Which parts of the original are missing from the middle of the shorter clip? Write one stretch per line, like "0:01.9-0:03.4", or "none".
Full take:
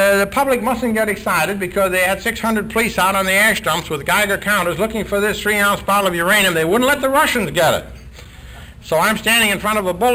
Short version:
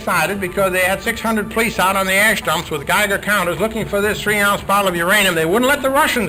none